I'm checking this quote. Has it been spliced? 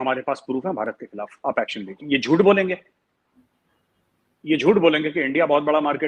yes; 1 cut; at 2.0 s

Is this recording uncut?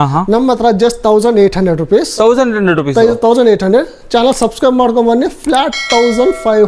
yes; 0 cuts

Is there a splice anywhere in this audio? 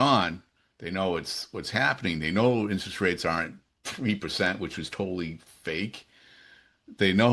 no; 0 cuts

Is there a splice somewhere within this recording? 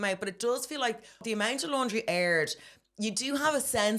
yes; 1 cut; at 1.2 s

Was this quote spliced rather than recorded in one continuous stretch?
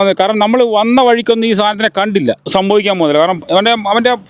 yes; 1 cut; at 2.4 s

